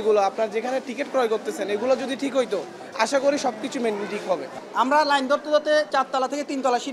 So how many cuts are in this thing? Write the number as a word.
two